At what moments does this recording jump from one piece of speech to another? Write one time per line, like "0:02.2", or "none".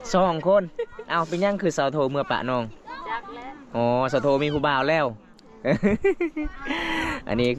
none